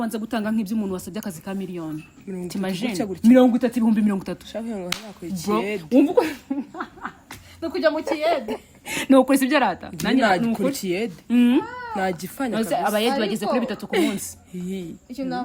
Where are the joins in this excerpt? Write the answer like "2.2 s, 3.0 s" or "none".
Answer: none